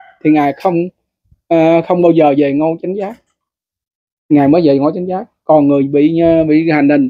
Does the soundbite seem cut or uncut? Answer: uncut